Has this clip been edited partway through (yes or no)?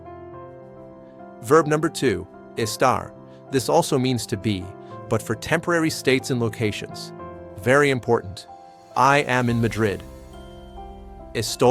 no